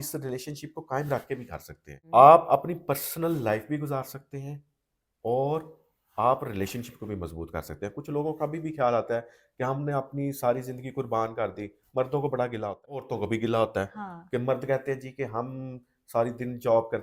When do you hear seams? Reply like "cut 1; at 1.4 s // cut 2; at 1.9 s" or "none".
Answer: cut 1; at 2.0 s // cut 2; at 13.1 s